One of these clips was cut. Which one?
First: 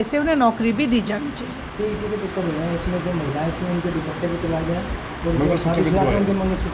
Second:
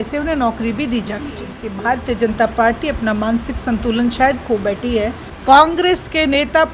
second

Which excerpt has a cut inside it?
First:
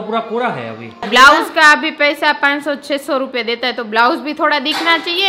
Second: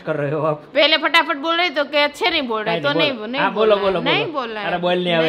first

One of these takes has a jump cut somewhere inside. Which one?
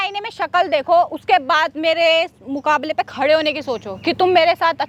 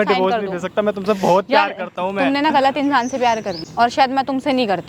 second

